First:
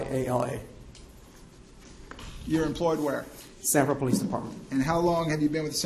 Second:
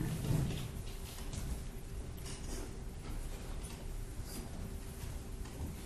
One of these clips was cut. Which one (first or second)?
second